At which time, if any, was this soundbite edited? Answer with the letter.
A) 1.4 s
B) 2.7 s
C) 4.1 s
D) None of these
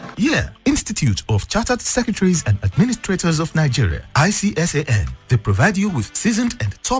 A